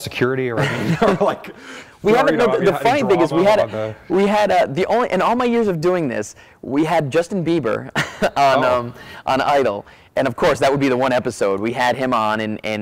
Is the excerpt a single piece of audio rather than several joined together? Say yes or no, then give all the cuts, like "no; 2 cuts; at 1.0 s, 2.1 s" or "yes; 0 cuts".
yes; 0 cuts